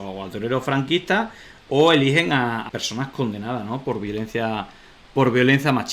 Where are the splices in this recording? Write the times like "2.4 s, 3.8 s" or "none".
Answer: 2.7 s